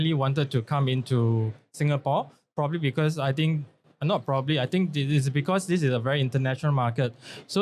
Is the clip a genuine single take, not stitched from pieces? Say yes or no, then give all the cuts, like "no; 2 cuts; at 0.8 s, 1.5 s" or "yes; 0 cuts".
yes; 0 cuts